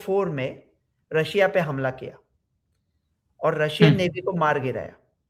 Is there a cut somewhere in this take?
no; 0 cuts

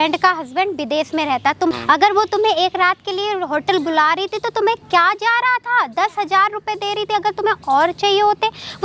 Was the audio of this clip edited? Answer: yes; 1 cut; at 1.7 s

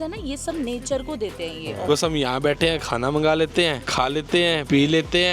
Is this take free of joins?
no; 1 cut; at 1.8 s

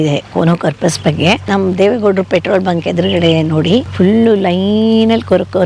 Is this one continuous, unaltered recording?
no; 2 cuts; at 1.4 s, 3.9 s

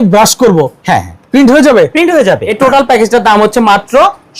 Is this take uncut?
no; 1 cut; at 2.5 s

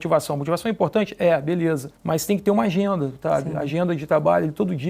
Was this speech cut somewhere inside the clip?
yes; 1 cut; at 1.9 s

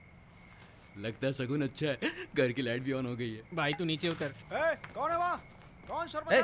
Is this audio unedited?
no; 2 cuts; at 3.4 s, 4.4 s

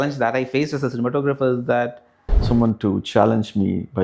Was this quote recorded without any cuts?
no; 1 cut; at 2.5 s

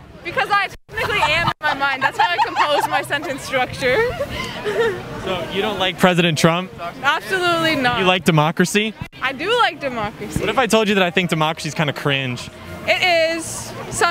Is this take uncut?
yes; 0 cuts

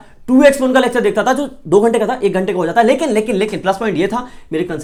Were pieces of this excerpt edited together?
no; 0 cuts

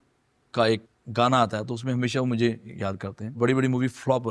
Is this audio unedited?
no; 2 cuts; at 0.9 s, 3.4 s

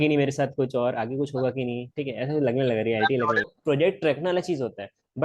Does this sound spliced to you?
yes; 1 cut; at 3.5 s

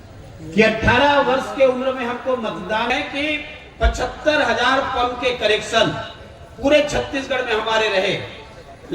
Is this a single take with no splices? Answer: no; 1 cut; at 2.9 s

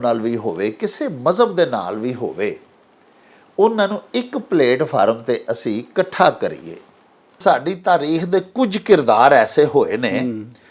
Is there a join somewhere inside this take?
yes; 1 cut; at 7.4 s

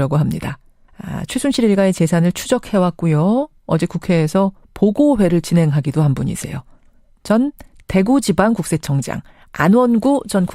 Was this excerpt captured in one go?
no; 1 cut; at 2.6 s

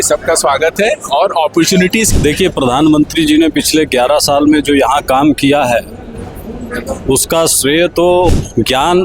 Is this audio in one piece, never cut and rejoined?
no; 2 cuts; at 2.1 s, 8.3 s

